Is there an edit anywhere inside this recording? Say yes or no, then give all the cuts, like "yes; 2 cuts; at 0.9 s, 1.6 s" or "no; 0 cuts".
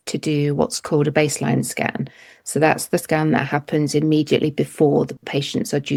no; 0 cuts